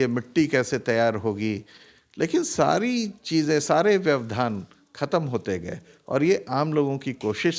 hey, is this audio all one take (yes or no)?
yes